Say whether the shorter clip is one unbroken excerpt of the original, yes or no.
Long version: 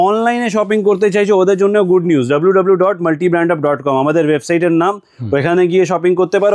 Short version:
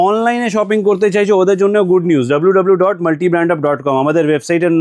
yes